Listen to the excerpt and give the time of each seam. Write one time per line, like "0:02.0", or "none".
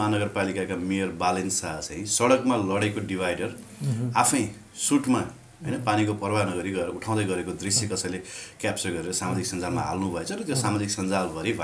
none